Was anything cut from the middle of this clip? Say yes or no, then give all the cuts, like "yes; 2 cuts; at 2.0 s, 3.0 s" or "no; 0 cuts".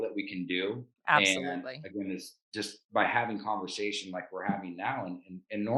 no; 0 cuts